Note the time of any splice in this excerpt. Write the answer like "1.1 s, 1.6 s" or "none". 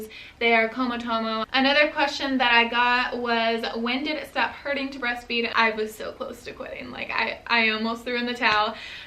1.5 s, 5.5 s